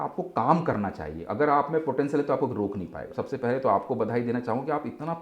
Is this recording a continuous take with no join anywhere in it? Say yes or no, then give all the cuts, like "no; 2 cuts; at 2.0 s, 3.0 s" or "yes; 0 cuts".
no; 1 cut; at 3.1 s